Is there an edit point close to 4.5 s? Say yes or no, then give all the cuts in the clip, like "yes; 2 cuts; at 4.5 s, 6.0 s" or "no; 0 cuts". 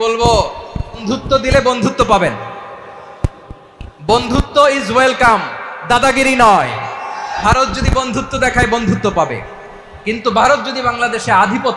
no; 2 cuts; at 1.0 s, 7.4 s